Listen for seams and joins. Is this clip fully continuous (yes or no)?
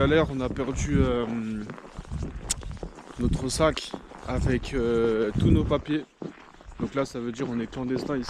yes